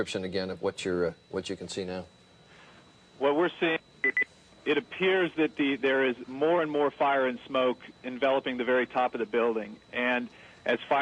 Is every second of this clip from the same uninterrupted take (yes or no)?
no